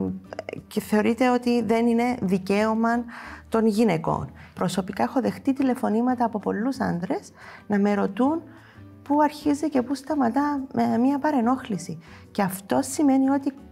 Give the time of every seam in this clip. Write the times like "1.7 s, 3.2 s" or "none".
4.4 s